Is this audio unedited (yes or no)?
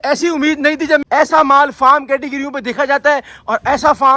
no